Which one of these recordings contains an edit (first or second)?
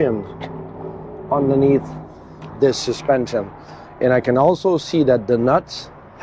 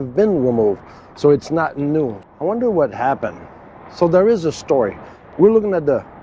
second